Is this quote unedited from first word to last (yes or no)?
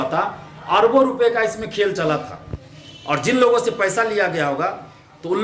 yes